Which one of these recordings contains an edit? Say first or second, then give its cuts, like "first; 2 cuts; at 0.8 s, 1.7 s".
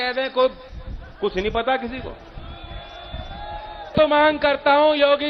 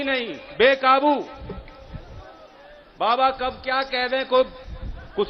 first; 1 cut; at 3.9 s